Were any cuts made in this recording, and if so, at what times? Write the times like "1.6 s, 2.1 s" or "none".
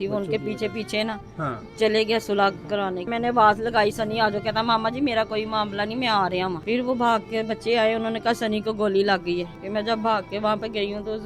3.1 s, 6.6 s, 9.6 s